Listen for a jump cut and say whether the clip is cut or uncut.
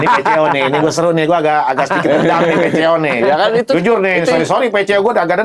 uncut